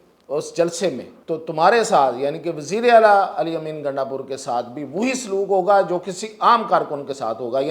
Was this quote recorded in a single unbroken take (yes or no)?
no